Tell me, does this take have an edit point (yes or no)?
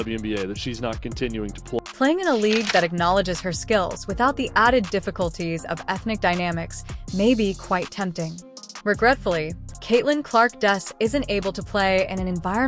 no